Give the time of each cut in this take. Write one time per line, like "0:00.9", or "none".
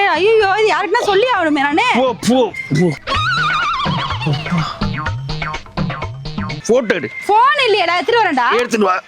0:06.6